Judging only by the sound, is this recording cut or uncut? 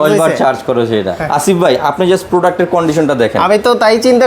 cut